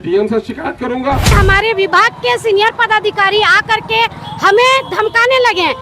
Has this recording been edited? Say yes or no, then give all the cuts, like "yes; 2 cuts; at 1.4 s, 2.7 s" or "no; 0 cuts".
yes; 1 cut; at 1.3 s